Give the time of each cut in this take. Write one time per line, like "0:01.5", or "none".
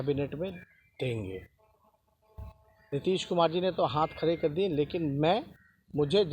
none